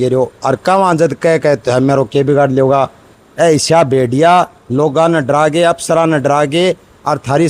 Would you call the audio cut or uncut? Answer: cut